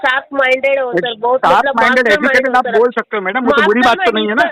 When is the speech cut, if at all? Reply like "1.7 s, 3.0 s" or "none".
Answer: none